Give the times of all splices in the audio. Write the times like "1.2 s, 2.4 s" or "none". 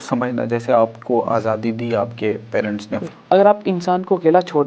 3.0 s

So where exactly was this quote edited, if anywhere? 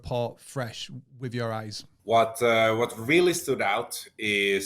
1.8 s

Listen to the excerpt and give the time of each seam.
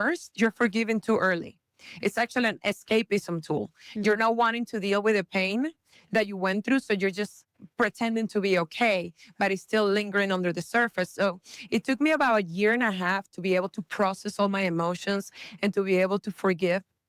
none

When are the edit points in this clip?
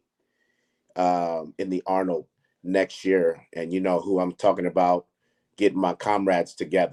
none

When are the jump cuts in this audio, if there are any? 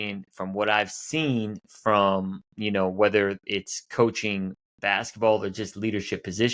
none

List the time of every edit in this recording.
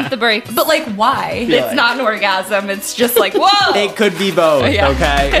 1.5 s

